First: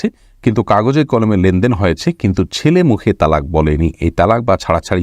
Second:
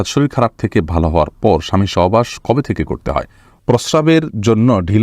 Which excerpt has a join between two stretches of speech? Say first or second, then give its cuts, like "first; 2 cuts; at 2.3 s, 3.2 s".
second; 1 cut; at 3.6 s